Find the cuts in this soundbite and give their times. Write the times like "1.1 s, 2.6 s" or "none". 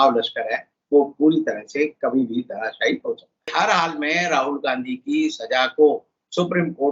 3.5 s